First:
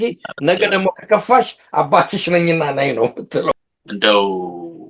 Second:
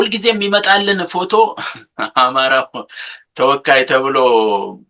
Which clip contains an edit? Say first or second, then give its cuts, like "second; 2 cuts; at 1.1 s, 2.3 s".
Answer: first; 1 cut; at 3.7 s